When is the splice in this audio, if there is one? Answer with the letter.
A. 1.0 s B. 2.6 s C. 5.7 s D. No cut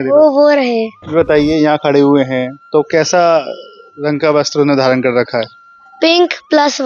A